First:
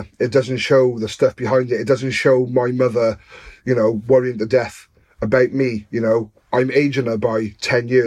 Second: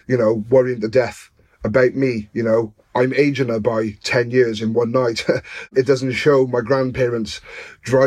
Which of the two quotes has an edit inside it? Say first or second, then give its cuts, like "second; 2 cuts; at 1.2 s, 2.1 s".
second; 1 cut; at 5.7 s